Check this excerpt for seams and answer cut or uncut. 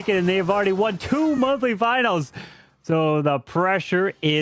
uncut